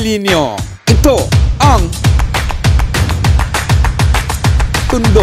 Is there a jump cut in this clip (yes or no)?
no